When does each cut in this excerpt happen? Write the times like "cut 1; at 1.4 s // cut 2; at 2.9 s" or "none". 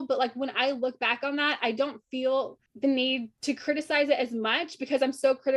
cut 1; at 2.6 s // cut 2; at 3.3 s